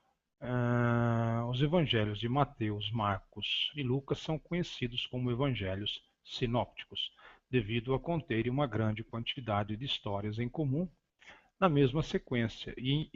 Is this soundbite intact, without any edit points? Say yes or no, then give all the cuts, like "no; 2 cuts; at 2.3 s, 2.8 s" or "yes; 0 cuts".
yes; 0 cuts